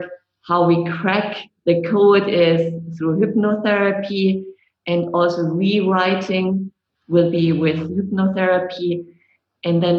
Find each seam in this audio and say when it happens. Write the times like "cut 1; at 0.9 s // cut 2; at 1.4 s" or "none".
none